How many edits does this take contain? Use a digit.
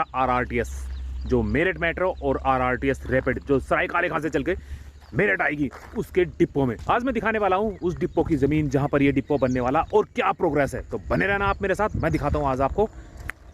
1